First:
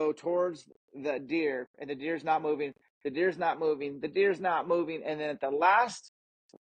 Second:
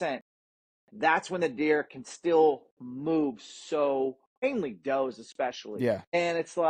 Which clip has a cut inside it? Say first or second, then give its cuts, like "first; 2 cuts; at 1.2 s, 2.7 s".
second; 2 cuts; at 4.4 s, 5.7 s